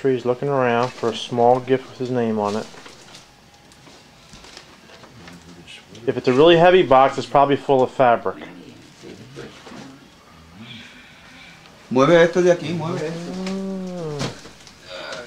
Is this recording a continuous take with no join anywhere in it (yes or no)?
no